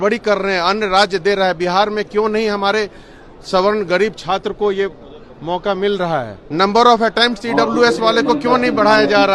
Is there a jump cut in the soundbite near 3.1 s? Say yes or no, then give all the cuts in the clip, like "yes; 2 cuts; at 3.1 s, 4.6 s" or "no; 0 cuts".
no; 1 cut; at 6.4 s